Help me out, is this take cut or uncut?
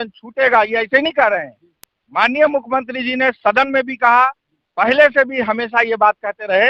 uncut